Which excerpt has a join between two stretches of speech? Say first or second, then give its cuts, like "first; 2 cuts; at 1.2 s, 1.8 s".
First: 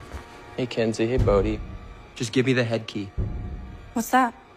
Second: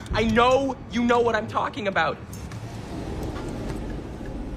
second; 1 cut; at 2.5 s